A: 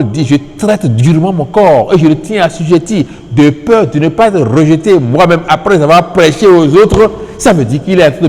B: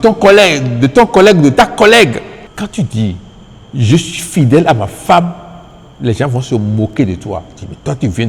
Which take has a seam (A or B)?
B